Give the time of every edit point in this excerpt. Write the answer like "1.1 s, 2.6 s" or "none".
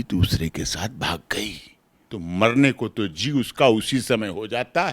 2.0 s